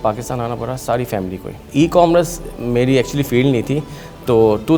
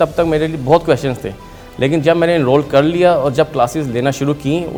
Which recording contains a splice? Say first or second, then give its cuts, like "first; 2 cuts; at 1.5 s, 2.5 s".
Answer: first; 1 cut; at 1.6 s